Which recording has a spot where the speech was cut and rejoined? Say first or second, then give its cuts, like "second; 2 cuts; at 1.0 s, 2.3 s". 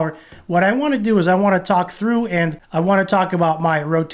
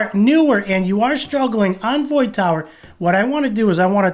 first; 1 cut; at 2.6 s